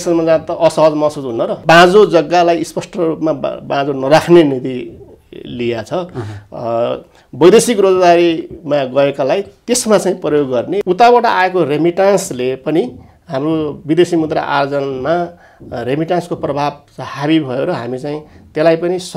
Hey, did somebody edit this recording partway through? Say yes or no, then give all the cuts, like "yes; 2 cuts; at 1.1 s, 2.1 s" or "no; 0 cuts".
yes; 2 cuts; at 1.6 s, 10.8 s